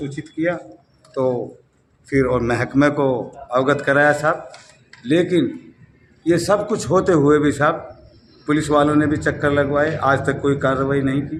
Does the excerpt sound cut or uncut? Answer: uncut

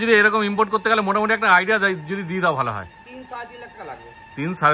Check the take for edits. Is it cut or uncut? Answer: uncut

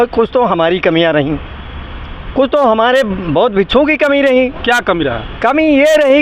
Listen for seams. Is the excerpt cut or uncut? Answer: uncut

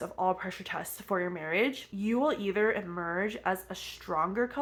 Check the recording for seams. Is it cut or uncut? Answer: uncut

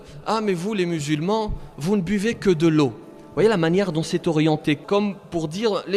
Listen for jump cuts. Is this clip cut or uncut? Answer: uncut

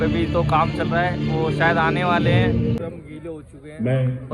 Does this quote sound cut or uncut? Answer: cut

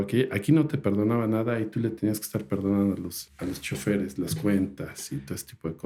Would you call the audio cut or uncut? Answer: uncut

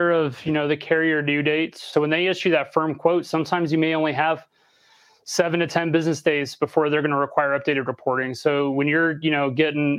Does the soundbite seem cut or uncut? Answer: cut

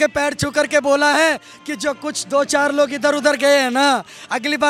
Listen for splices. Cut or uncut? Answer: uncut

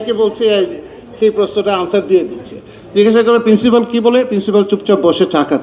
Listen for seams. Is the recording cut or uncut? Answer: cut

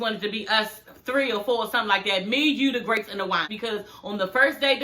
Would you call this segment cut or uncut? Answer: cut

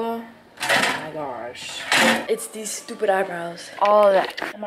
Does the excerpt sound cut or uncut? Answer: cut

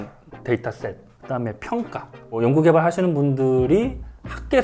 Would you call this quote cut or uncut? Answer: cut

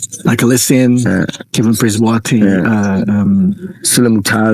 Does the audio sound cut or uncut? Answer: uncut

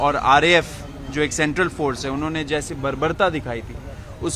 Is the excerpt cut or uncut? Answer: uncut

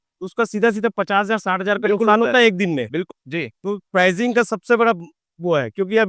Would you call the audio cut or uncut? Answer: cut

